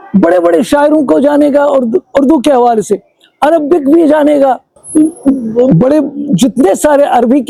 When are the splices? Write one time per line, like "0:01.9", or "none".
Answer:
none